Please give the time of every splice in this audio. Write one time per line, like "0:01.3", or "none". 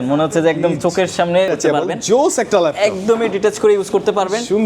0:01.5